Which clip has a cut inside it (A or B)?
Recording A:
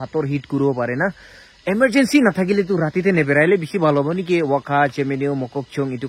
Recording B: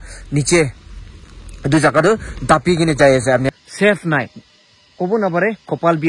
B